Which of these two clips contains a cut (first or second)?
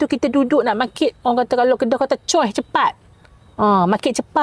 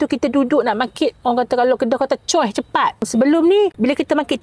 second